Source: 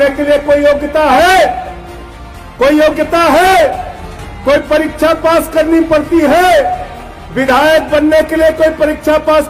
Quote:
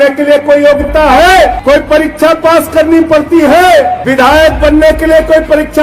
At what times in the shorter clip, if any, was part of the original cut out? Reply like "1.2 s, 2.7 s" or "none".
1.6 s, 4.0 s